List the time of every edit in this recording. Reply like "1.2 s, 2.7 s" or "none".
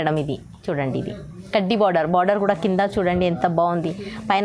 none